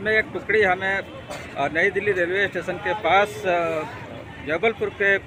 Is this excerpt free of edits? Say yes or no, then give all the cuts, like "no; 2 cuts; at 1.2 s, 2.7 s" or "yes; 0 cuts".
yes; 0 cuts